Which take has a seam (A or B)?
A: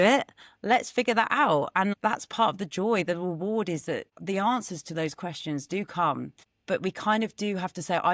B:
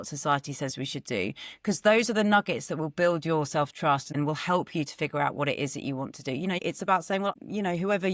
B